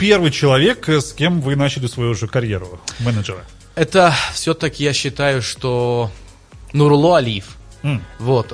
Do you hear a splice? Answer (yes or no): no